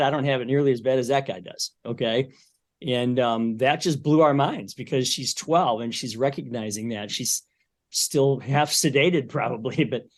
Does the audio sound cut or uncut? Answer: uncut